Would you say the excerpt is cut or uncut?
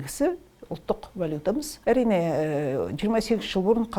cut